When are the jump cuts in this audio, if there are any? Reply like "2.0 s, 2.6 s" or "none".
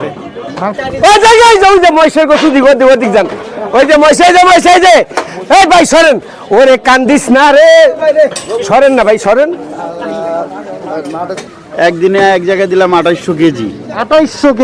0.8 s, 11.4 s